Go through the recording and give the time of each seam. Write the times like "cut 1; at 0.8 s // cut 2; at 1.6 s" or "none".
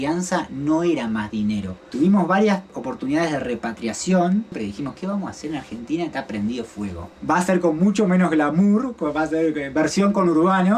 cut 1; at 1.9 s // cut 2; at 4.5 s // cut 3; at 7.1 s